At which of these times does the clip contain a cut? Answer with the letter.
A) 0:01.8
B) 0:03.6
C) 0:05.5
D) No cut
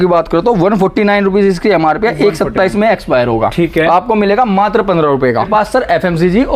C